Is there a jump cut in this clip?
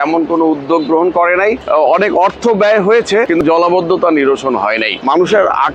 yes; 3 cuts; at 1.6 s, 3.4 s, 4.9 s

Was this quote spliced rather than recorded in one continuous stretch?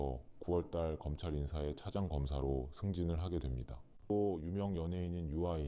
yes; 1 cut; at 4.1 s

